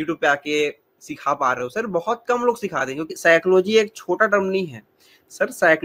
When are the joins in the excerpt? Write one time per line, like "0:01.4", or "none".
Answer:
0:03.1